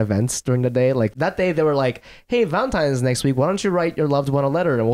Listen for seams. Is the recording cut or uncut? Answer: cut